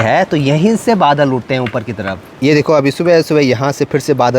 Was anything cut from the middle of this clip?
no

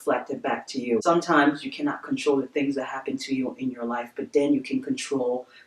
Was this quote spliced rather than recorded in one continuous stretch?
yes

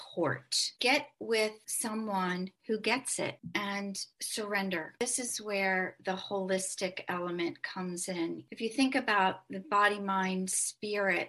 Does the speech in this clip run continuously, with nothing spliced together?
no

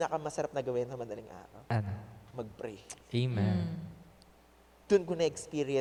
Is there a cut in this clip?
no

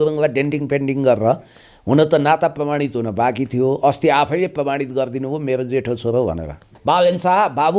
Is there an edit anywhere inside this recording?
yes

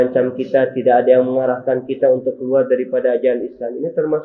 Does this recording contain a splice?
no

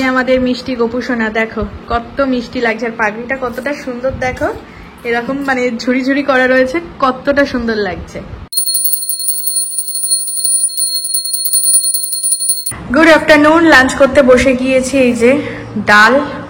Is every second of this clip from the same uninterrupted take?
yes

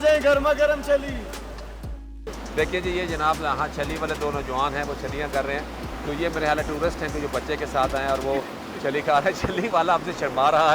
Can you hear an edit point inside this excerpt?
no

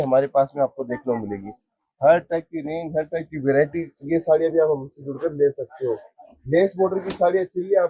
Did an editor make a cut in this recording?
no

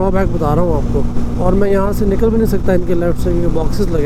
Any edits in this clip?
no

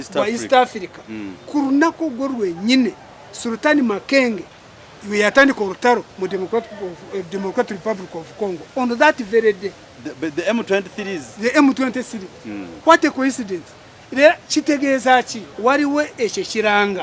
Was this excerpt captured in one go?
no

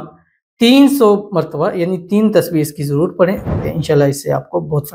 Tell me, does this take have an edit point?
yes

